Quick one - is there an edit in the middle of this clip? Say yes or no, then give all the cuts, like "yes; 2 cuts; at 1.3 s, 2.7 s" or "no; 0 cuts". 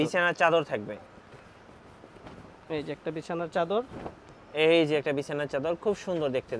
no; 0 cuts